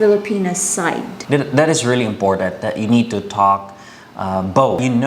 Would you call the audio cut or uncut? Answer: cut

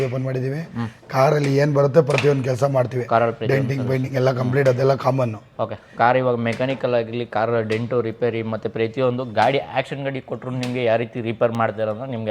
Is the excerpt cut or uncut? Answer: uncut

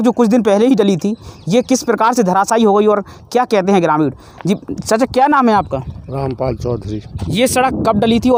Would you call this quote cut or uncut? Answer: uncut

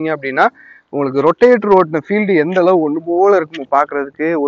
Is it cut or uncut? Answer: uncut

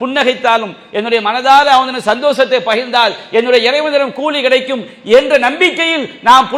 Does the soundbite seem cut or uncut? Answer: uncut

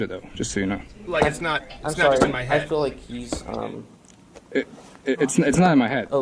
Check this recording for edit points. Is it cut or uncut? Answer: cut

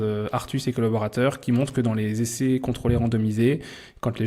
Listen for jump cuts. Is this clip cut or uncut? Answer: uncut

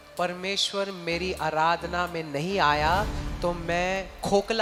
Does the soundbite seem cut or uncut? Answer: uncut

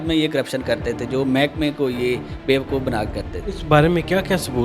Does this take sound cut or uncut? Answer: cut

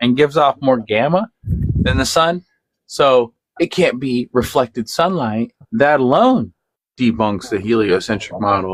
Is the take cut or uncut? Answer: uncut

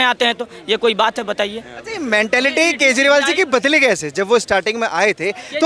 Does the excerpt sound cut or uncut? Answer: uncut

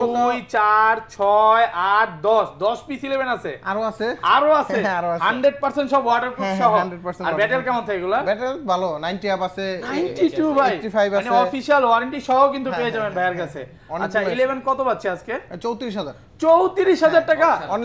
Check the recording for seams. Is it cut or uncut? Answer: uncut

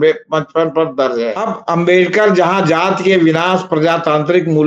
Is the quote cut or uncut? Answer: cut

